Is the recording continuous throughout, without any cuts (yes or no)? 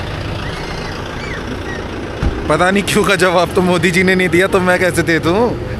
yes